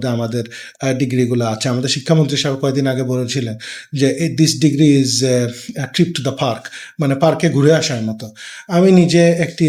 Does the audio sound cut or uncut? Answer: uncut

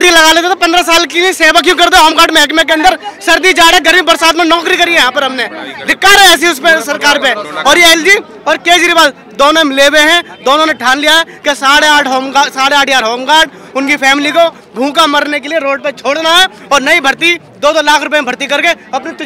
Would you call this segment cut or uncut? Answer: uncut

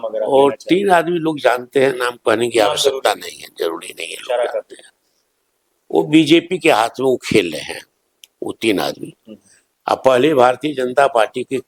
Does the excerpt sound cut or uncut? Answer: uncut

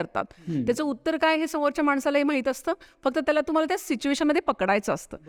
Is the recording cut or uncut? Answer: uncut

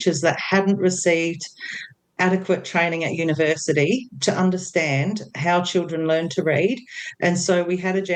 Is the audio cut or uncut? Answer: uncut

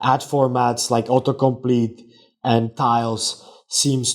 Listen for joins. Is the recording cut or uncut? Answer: uncut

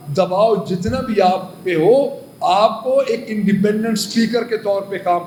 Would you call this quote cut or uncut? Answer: uncut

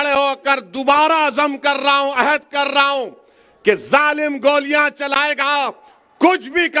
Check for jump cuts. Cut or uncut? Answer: uncut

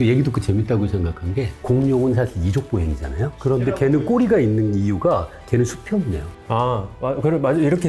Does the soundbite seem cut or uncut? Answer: uncut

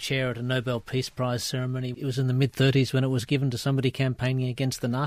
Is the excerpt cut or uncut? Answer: cut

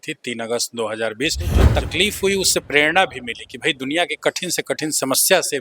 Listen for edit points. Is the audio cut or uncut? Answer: cut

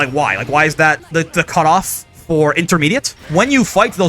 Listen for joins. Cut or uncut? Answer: cut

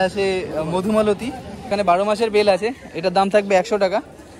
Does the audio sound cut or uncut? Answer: cut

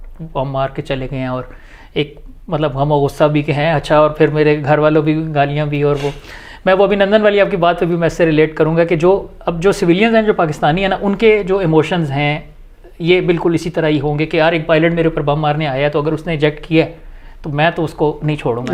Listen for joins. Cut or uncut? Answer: uncut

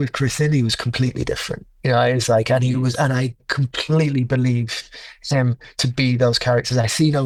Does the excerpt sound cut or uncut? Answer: uncut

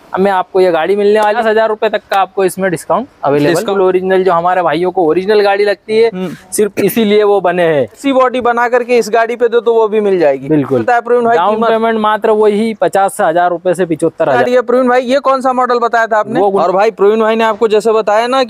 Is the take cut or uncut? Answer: cut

